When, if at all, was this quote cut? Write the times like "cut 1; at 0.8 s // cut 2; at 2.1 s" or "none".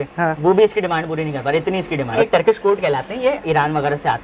cut 1; at 2.2 s